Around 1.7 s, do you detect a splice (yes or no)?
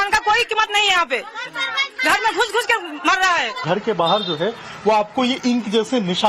no